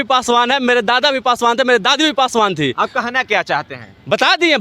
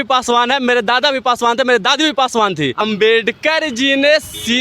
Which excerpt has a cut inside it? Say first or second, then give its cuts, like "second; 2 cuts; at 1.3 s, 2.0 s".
second; 1 cut; at 2.8 s